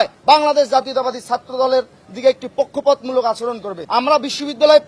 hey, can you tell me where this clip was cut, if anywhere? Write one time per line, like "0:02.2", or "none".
0:03.7